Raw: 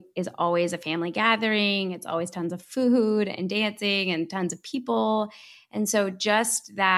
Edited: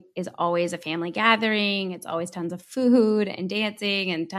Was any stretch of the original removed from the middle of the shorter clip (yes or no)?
no